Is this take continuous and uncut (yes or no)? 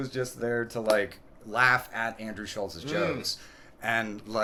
yes